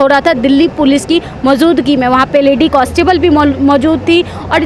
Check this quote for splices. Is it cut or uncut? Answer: uncut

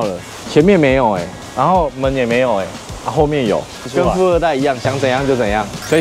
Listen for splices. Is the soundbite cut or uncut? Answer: uncut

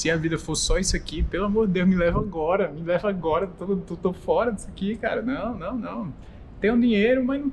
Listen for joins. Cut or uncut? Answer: uncut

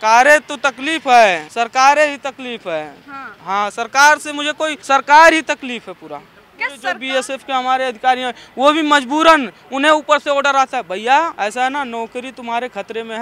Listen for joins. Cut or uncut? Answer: cut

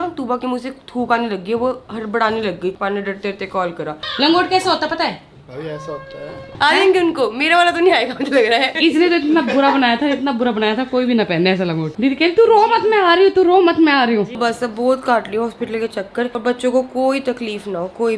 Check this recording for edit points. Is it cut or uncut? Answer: cut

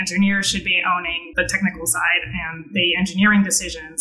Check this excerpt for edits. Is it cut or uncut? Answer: cut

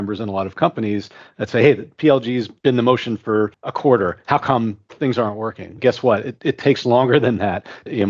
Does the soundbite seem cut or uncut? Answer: cut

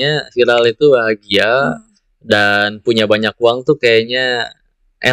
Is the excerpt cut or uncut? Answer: uncut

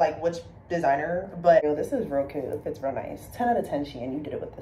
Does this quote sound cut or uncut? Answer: cut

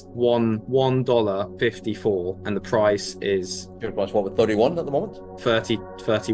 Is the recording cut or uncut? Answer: uncut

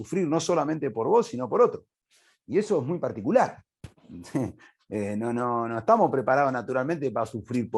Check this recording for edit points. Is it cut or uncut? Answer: uncut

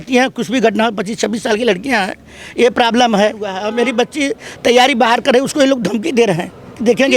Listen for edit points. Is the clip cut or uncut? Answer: cut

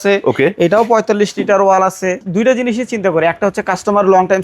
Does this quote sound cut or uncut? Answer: cut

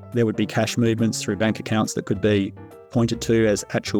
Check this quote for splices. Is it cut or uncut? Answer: uncut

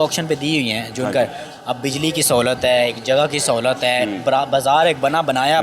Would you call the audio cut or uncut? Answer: uncut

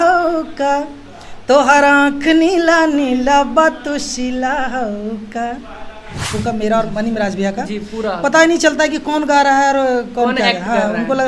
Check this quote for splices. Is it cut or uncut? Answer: cut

